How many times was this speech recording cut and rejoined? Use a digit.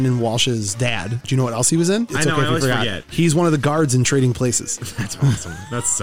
2